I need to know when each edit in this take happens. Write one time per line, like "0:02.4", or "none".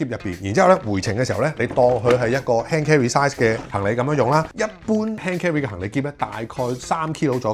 0:04.5